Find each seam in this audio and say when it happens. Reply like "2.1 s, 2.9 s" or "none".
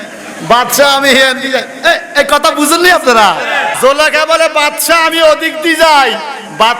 3.7 s